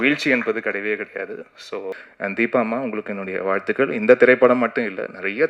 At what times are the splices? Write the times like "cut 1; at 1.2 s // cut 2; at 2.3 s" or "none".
cut 1; at 2.0 s